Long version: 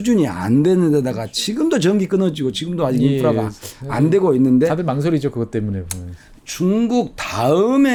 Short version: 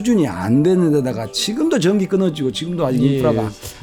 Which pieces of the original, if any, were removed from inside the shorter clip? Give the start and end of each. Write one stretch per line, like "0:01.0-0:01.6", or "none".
none